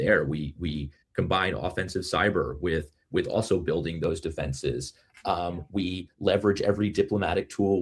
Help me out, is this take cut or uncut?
uncut